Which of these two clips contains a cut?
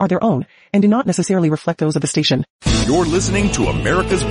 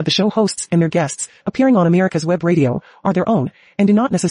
first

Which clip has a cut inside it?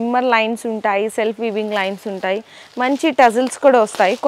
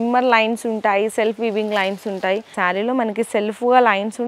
second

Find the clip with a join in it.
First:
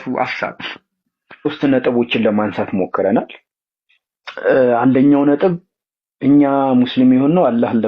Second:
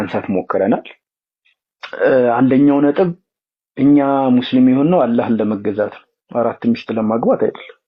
first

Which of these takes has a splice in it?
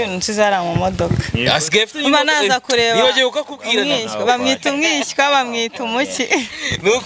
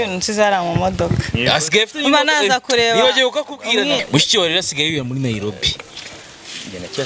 second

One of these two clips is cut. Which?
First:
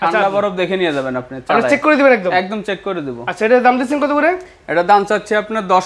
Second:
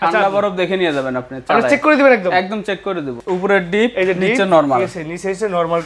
second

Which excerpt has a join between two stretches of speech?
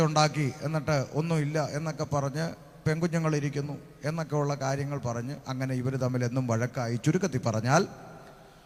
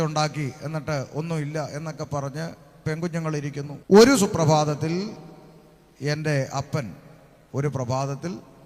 second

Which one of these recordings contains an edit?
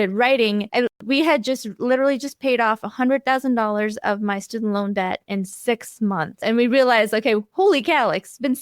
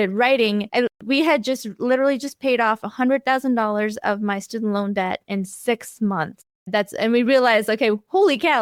first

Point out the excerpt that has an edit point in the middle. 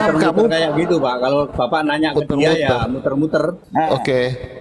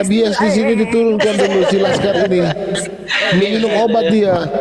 first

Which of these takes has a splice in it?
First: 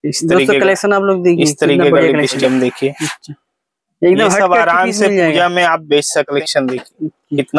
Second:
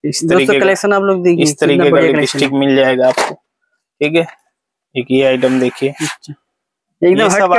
first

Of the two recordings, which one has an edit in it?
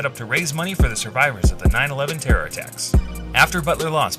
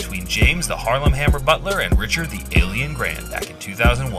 first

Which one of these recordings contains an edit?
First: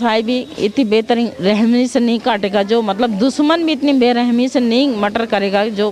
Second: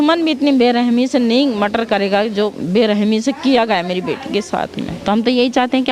second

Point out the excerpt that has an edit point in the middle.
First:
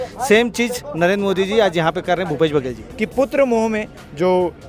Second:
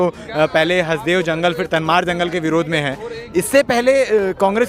first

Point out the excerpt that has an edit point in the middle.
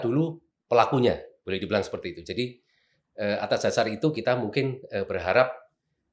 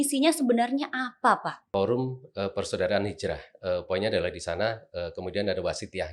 second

